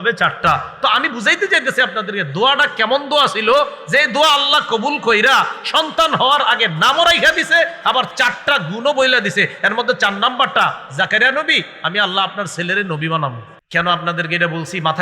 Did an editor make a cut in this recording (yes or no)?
yes